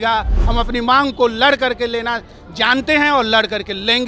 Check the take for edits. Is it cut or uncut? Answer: uncut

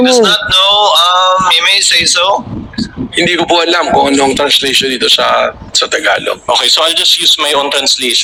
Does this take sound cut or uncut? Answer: uncut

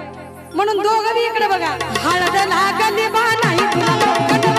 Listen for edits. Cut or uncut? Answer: cut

